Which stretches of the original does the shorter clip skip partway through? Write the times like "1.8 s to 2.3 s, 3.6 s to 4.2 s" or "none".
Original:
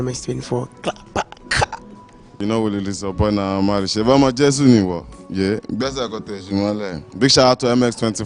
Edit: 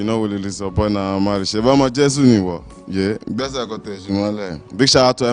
none